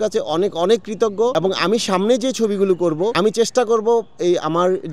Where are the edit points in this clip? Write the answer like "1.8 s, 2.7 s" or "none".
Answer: 1.3 s, 3.1 s

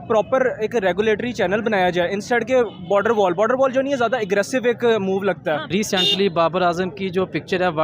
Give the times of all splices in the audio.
5.7 s

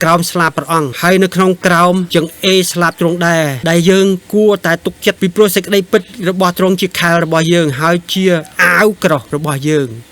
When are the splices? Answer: 0.9 s, 2.1 s, 3.6 s

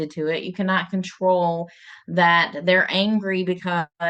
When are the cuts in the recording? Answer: none

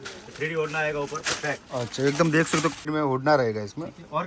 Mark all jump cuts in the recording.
2.9 s

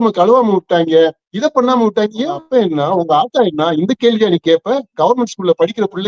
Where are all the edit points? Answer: 2.4 s

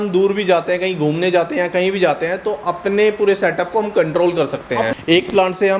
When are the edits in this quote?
4.9 s

